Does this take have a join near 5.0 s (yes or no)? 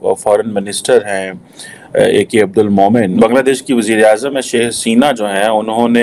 no